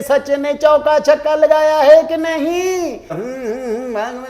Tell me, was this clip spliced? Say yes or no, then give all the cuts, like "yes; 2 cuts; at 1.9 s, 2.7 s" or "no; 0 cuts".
yes; 1 cut; at 3.2 s